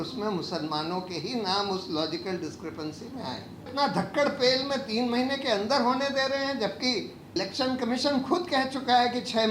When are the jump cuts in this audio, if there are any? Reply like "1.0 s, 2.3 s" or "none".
3.7 s, 7.4 s